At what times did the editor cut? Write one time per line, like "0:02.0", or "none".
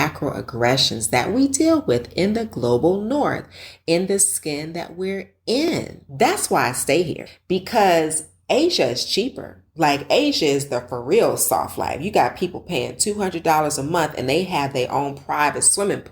0:06.0
0:07.3